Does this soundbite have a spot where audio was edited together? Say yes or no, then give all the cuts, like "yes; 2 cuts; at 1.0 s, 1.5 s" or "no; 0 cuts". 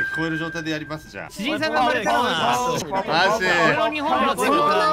yes; 2 cuts; at 1.2 s, 2.8 s